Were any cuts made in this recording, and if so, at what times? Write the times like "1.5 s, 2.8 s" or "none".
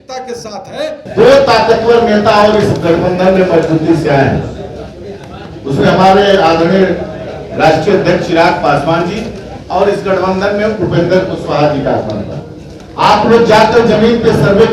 1.0 s